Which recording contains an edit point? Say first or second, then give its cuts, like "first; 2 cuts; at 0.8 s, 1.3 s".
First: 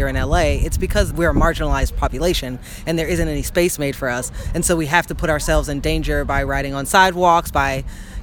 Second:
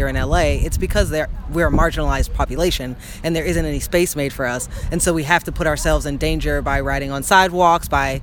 first; 1 cut; at 1.1 s